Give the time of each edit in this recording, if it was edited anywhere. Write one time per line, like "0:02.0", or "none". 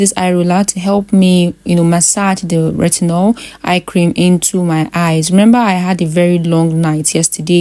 none